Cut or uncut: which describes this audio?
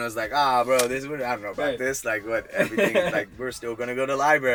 uncut